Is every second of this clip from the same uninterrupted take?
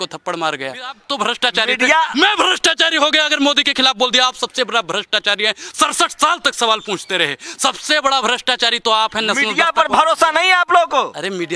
no; 1 cut; at 1.0 s

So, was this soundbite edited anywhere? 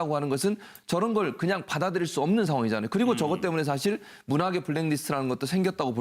no; 0 cuts

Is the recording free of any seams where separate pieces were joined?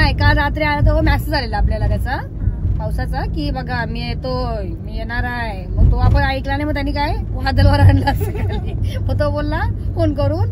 yes; 0 cuts

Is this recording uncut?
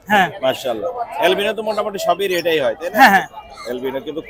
yes; 0 cuts

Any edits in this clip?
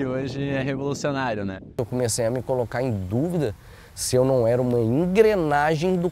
yes; 1 cut; at 1.8 s

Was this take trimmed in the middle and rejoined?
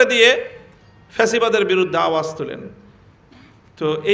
no; 0 cuts

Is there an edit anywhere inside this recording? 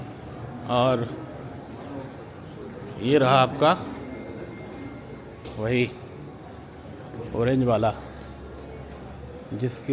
no; 0 cuts

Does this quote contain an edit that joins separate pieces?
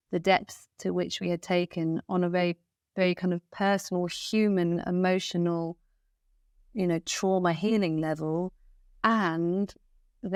no; 0 cuts

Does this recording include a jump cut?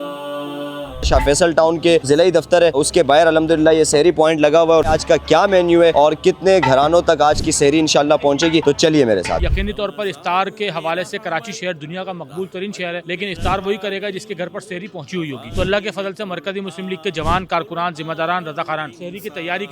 yes; 1 cut; at 1.1 s

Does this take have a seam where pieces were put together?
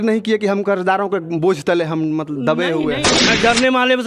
yes; 1 cut; at 3.1 s

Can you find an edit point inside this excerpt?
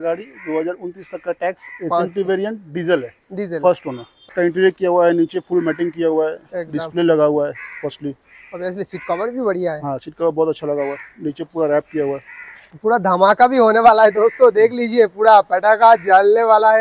yes; 1 cut; at 4.3 s

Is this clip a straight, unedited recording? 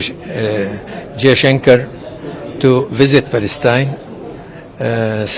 yes; 0 cuts

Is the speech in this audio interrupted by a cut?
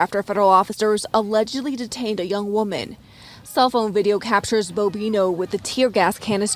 no; 0 cuts

